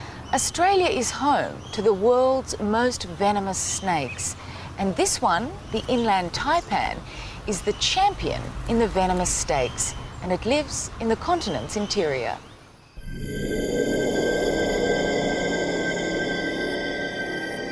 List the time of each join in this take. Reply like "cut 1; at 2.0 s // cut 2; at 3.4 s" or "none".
none